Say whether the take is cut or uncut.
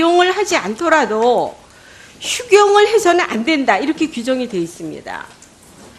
cut